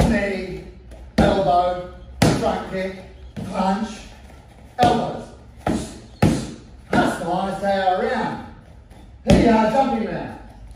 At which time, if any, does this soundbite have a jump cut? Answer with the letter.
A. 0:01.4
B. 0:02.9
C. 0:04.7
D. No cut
D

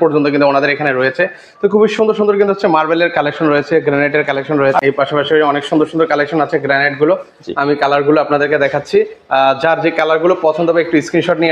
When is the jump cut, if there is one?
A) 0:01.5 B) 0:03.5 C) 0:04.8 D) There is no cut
C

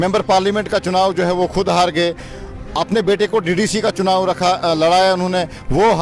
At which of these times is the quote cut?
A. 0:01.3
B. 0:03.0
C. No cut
C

